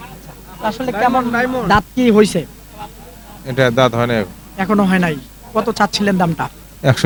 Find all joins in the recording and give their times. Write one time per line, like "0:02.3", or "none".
none

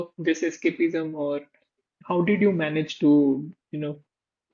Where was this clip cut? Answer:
none

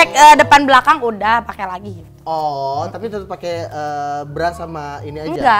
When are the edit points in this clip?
none

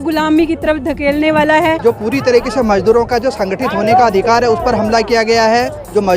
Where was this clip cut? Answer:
0:01.8

